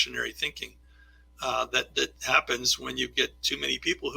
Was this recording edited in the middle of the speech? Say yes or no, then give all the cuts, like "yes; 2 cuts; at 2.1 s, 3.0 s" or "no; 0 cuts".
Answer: no; 0 cuts